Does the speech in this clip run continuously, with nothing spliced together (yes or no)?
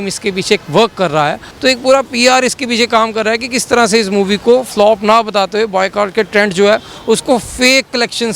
no